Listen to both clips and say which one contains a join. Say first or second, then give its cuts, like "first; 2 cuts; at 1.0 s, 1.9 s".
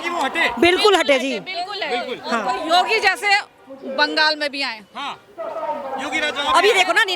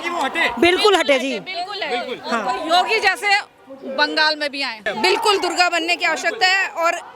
second; 1 cut; at 4.8 s